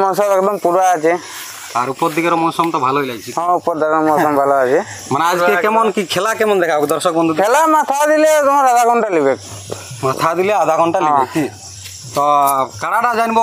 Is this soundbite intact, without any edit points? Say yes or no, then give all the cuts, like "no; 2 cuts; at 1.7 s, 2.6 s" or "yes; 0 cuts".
yes; 0 cuts